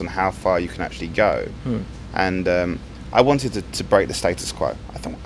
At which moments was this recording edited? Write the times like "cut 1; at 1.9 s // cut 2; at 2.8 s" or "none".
none